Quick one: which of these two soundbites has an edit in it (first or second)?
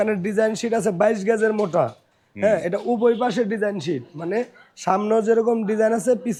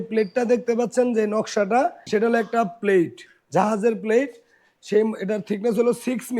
second